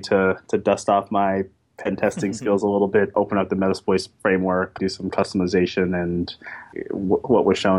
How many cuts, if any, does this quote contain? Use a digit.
3